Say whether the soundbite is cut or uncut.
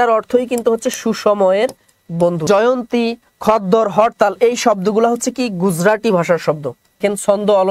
cut